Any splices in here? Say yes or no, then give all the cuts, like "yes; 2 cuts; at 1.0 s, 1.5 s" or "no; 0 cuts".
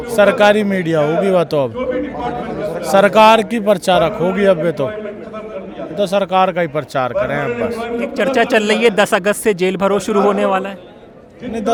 no; 0 cuts